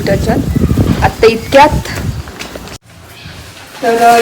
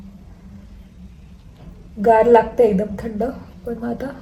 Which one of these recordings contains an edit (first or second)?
first